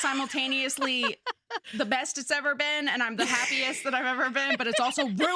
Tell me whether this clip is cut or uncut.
cut